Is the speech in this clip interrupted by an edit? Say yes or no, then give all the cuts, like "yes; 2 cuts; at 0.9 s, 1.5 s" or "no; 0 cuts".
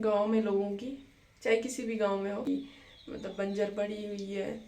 yes; 1 cut; at 2.5 s